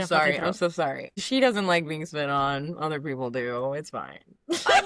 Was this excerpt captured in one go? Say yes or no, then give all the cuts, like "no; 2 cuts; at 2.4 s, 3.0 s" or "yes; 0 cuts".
no; 1 cut; at 1.1 s